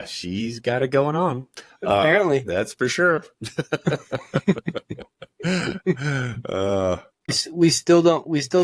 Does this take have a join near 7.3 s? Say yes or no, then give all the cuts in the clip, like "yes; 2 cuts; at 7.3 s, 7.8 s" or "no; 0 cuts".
yes; 1 cut; at 7.3 s